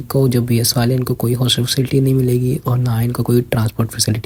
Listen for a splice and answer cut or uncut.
uncut